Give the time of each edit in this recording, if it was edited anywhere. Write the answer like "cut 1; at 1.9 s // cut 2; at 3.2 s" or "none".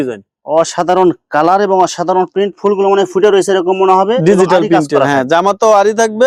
none